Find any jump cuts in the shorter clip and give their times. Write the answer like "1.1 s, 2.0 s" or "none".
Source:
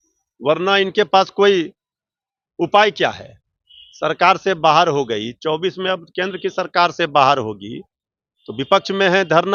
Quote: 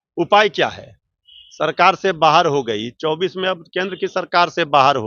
none